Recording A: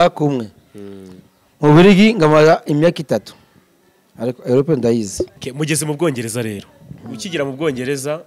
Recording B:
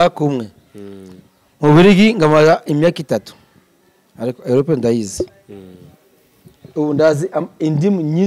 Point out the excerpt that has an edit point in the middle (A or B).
A